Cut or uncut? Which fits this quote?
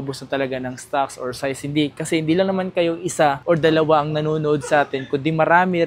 uncut